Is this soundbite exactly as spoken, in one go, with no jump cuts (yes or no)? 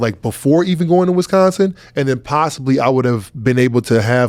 yes